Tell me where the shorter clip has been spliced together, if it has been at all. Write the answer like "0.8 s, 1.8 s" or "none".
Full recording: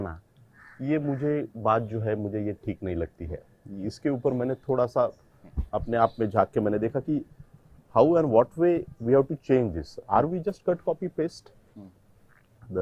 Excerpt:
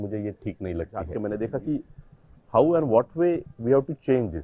1.1 s